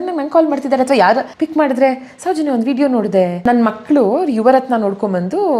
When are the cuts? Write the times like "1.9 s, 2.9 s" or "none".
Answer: 1.3 s, 3.4 s